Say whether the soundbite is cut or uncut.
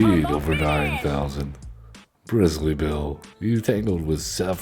uncut